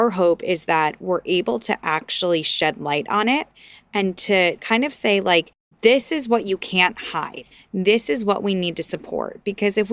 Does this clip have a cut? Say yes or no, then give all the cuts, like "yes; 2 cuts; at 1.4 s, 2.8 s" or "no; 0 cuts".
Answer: no; 0 cuts